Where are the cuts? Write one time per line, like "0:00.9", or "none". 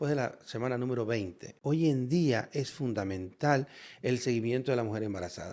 0:01.5